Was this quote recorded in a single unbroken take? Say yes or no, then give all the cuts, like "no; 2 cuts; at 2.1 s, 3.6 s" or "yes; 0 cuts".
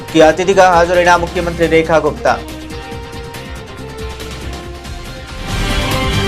no; 1 cut; at 2.6 s